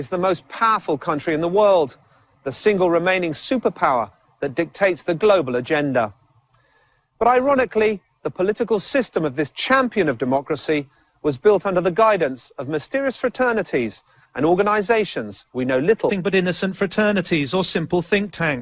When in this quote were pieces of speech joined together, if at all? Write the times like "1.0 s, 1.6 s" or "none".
none

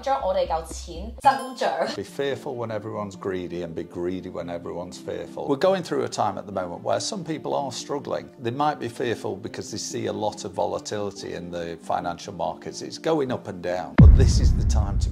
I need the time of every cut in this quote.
2.0 s, 5.4 s, 8.3 s

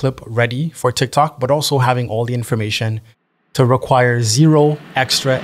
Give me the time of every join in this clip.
none

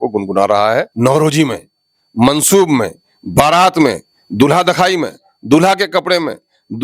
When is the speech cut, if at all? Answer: 0.9 s

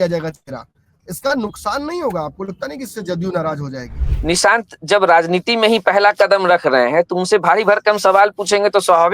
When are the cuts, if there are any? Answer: 4.0 s

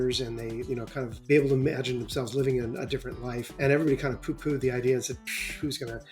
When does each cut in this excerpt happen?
1.1 s, 3.4 s

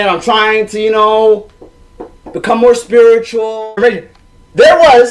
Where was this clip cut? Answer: 3.7 s

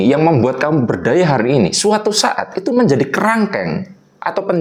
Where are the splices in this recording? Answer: none

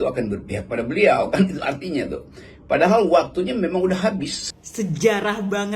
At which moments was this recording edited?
4.4 s

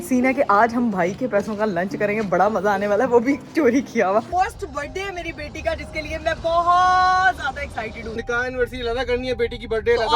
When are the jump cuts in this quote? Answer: 4.3 s, 8.1 s

